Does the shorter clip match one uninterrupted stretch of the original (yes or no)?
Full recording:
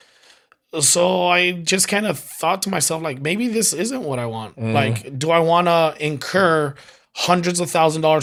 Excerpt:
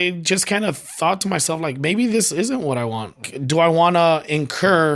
no